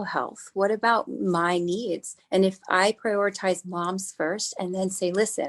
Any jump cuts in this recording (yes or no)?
yes